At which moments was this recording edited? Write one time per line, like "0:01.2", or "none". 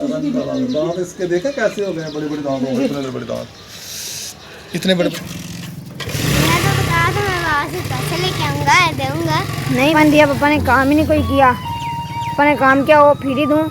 0:05.1
0:09.9

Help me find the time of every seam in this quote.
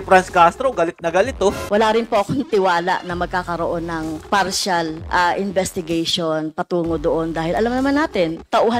0:01.6

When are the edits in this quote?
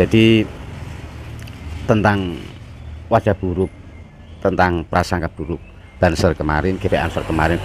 none

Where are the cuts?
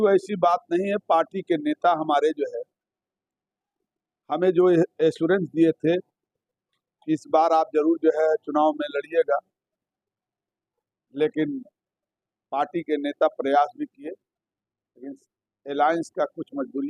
none

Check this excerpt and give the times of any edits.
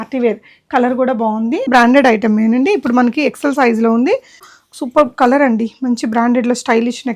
0:01.7
0:04.4

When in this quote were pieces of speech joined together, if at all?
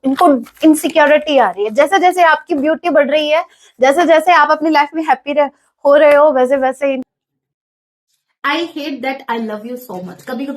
0:07.0

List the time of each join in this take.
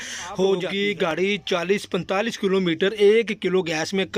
0:01.1

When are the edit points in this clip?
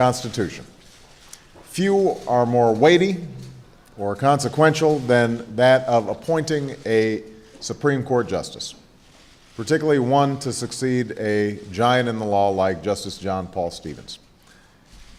none

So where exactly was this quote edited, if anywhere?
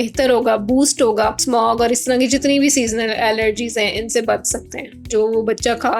0:01.4
0:05.1

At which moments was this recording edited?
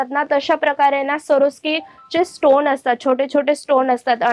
none

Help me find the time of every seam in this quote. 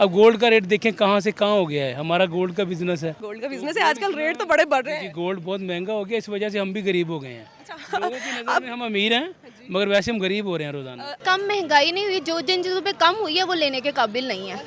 0:03.3
0:11.1

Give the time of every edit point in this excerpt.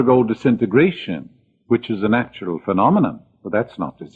0:02.7

